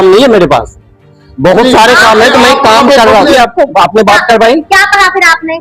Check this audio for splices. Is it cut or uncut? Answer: cut